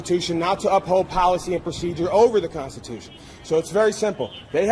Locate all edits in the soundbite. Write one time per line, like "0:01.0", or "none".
none